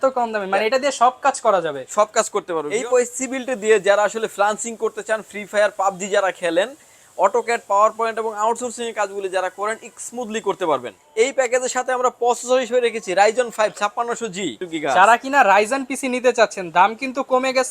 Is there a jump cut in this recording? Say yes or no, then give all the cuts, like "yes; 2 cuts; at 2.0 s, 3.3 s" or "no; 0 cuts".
yes; 3 cuts; at 2.7 s, 11.0 s, 14.6 s